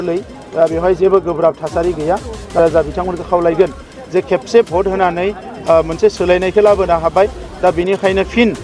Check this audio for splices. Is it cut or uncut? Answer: cut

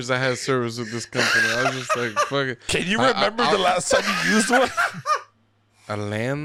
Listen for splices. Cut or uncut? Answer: uncut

